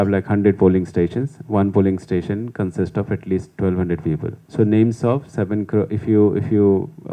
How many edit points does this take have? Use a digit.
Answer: 1